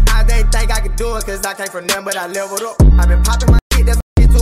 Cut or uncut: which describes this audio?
uncut